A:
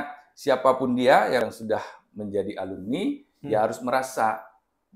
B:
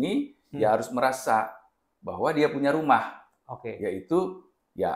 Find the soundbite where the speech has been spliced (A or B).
A